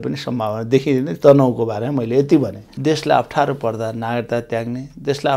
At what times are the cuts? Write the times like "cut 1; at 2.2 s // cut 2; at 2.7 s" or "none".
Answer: cut 1; at 1.1 s // cut 2; at 2.6 s